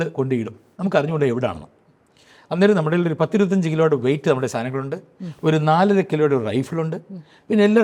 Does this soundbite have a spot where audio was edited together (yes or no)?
no